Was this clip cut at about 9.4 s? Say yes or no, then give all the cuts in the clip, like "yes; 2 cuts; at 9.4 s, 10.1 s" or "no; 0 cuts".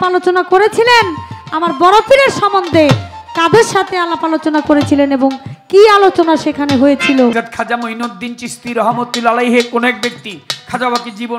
no; 1 cut; at 7.3 s